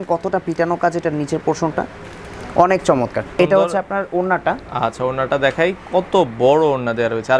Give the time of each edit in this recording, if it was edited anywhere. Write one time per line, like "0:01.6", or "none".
0:03.4